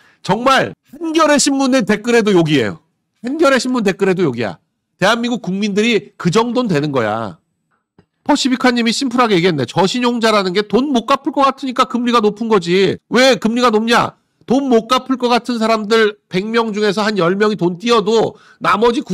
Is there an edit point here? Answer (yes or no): no